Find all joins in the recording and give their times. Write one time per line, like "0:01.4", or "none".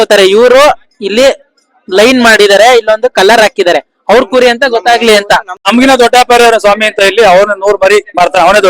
0:05.6